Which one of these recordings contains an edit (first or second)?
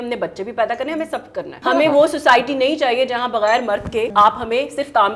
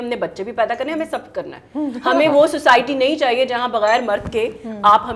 first